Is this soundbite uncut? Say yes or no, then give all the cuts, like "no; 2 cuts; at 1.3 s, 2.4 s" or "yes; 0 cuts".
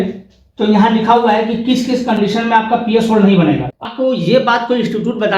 no; 1 cut; at 3.9 s